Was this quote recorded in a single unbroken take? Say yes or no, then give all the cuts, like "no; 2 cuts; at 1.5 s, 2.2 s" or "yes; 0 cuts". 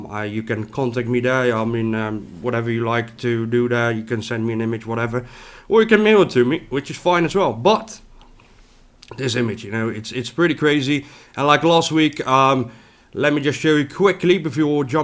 yes; 0 cuts